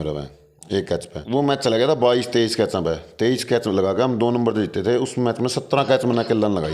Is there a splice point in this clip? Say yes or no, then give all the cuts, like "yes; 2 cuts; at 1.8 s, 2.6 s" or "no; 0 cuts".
yes; 1 cut; at 1.1 s